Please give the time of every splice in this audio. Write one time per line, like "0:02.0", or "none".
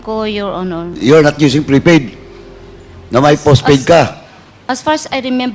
0:01.0